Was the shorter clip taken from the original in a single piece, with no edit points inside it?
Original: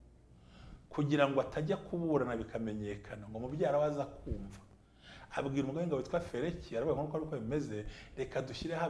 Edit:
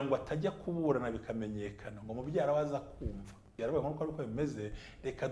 no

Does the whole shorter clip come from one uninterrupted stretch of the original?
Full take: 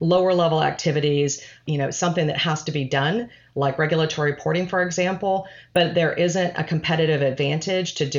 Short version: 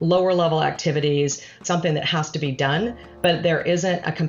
no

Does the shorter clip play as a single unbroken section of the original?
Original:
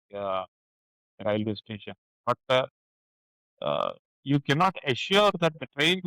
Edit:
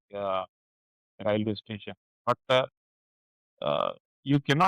yes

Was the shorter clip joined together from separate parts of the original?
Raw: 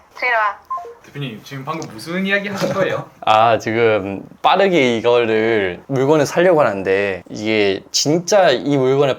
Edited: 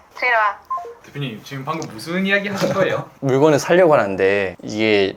yes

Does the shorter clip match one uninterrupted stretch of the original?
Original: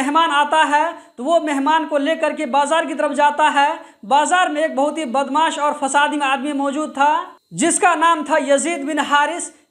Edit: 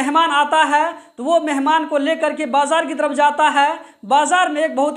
yes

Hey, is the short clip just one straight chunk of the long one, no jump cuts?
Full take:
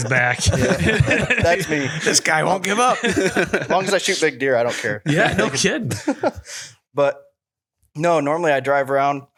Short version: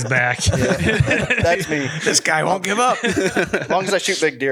yes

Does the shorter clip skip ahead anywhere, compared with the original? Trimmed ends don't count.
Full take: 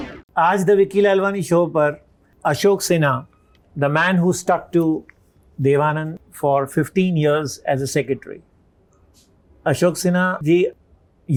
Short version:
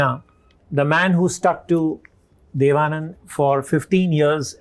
no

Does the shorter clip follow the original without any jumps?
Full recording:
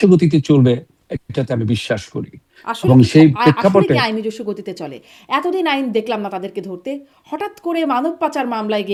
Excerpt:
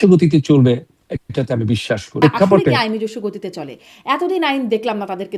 no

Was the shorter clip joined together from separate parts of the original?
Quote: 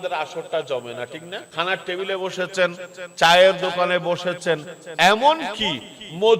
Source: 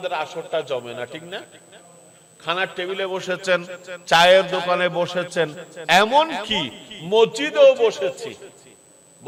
yes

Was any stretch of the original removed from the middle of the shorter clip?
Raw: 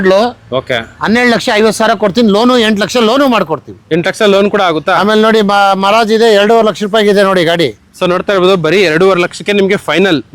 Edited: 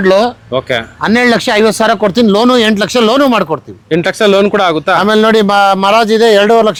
no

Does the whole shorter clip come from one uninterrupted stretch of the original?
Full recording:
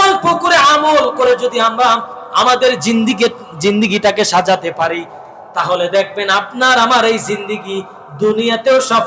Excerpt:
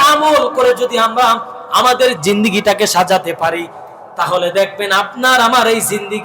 no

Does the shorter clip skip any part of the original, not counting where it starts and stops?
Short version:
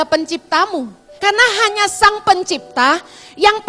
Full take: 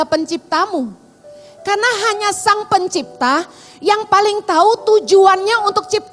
yes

